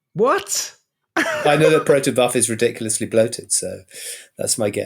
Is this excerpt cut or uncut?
uncut